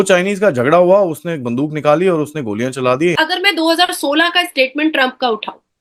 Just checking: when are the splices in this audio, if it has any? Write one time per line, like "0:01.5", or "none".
0:03.2